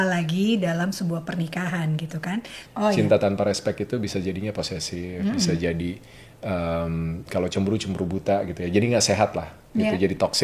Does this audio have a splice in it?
yes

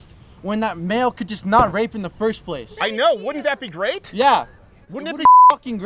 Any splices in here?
no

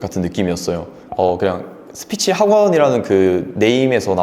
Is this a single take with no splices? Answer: no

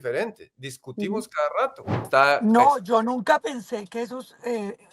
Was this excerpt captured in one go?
no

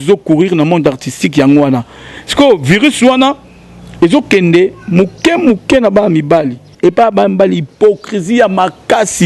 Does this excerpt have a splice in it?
yes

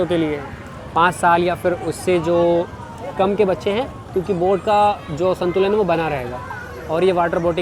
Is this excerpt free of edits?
yes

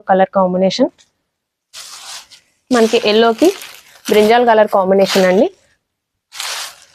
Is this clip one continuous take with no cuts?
yes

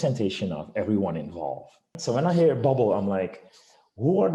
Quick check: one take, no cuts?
no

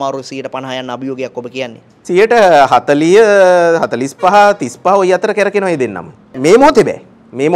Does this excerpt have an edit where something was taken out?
no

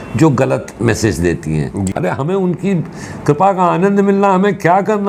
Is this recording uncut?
no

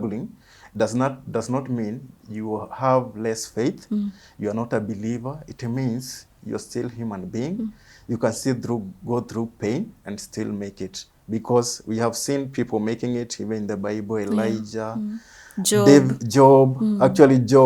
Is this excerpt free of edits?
yes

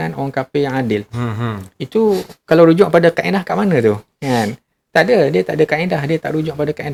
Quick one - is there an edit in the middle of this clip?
no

